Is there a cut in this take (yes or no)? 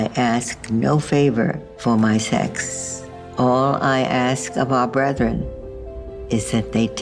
no